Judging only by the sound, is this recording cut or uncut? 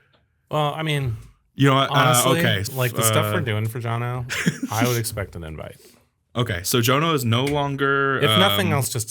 cut